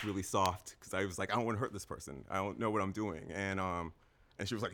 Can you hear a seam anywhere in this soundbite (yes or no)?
no